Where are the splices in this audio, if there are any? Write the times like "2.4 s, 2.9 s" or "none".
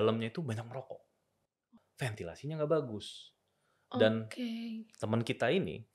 1.7 s